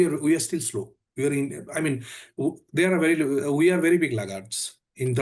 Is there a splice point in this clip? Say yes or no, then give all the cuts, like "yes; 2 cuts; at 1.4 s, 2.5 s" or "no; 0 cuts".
no; 0 cuts